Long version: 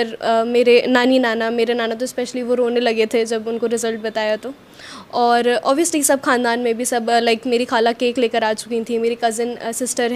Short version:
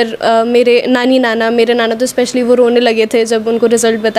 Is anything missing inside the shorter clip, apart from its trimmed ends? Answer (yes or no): no